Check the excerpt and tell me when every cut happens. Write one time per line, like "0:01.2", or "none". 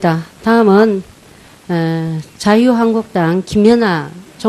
0:01.1